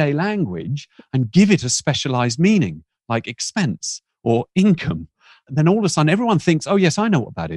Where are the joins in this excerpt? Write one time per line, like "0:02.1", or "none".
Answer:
none